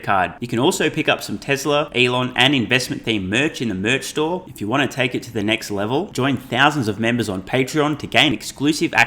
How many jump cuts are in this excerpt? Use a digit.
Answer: 1